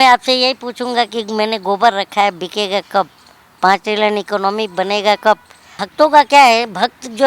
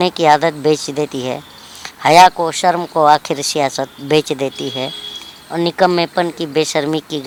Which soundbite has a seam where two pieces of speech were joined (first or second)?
first